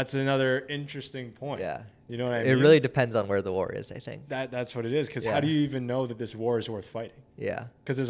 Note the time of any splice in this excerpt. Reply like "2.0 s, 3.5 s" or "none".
none